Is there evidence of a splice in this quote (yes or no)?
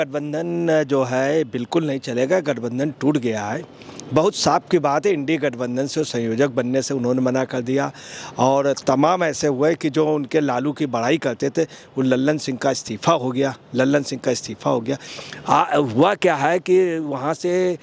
yes